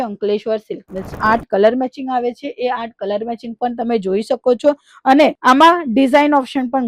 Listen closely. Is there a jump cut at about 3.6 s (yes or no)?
no